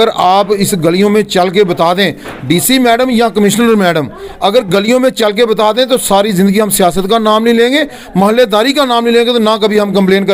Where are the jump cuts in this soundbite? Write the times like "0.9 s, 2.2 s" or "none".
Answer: none